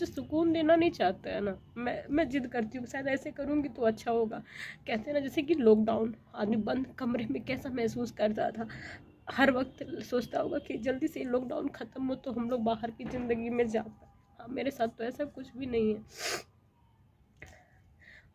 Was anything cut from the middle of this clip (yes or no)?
no